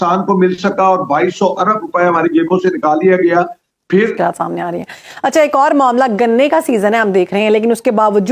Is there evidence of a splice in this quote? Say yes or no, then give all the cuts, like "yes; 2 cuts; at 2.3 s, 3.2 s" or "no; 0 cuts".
yes; 1 cut; at 3.9 s